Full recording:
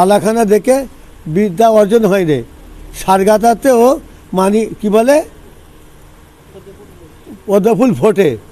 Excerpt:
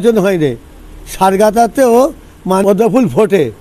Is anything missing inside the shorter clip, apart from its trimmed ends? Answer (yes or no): yes